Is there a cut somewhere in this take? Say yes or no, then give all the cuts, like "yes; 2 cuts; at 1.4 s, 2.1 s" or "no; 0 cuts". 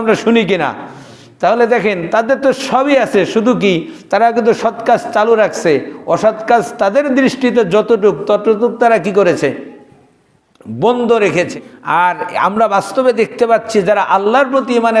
yes; 1 cut; at 11.5 s